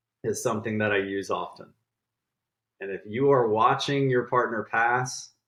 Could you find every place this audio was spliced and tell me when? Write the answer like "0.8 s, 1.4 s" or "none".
none